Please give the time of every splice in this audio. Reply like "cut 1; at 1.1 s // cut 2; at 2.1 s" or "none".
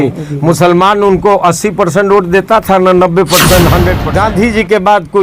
cut 1; at 4.0 s